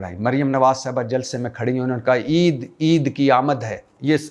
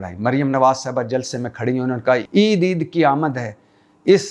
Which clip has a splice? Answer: second; 1 cut; at 2.2 s

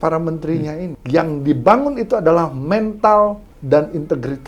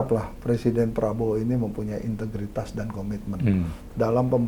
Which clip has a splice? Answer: first; 2 cuts; at 0.9 s, 3.5 s

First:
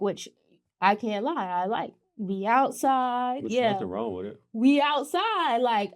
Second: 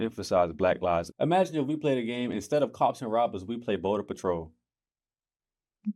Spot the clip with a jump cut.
second; 1 cut; at 1.1 s

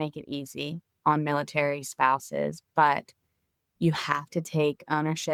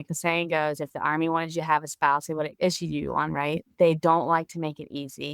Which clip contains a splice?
second; 2 cuts; at 2.5 s, 3.6 s

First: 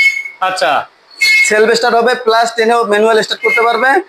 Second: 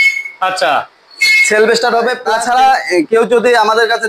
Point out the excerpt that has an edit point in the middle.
second; 1 cut; at 2.2 s

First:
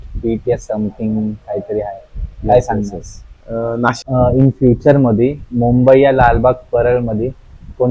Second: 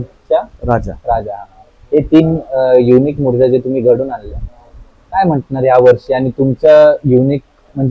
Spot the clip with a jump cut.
first; 1 cut; at 4.0 s

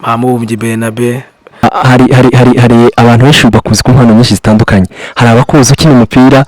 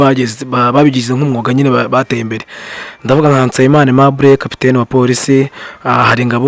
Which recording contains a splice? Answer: first; 1 cut; at 1.6 s

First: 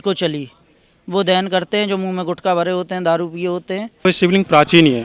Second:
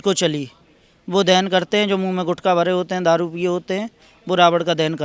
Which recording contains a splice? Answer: first; 1 cut; at 4.1 s

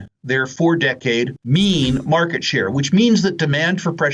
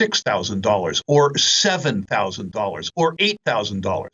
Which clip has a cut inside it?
first; 1 cut; at 1.4 s

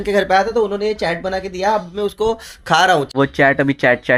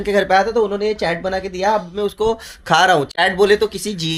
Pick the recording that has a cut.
first; 1 cut; at 3.1 s

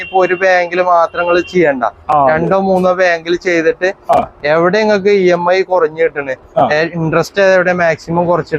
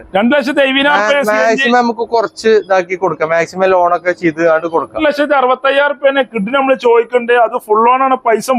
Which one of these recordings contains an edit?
second; 1 cut; at 5.0 s

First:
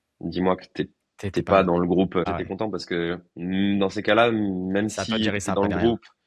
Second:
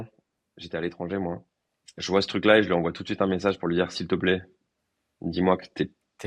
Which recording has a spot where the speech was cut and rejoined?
first; 1 cut; at 2.2 s

